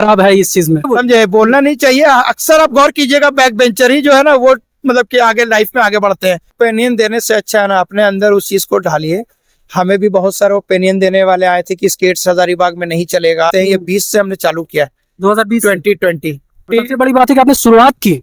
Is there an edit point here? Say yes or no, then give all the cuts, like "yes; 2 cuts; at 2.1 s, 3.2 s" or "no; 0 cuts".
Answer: yes; 4 cuts; at 0.8 s, 6.5 s, 13.5 s, 16.6 s